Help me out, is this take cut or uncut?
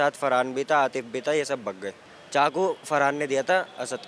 cut